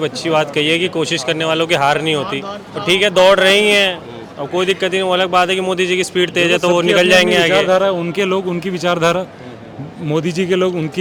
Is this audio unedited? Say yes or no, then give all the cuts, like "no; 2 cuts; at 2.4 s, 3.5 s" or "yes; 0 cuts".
yes; 0 cuts